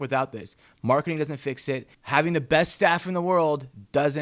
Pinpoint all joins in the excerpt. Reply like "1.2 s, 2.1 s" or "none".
1.9 s